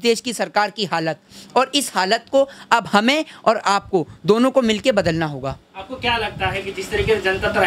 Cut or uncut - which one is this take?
uncut